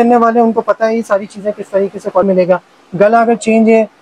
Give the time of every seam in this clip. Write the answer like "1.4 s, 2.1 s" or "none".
2.2 s